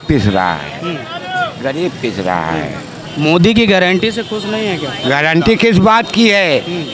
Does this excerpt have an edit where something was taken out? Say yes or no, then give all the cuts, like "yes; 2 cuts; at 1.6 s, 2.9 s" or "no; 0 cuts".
no; 0 cuts